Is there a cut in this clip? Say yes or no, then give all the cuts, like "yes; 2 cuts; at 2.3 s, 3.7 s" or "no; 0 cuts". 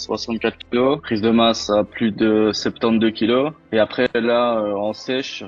no; 0 cuts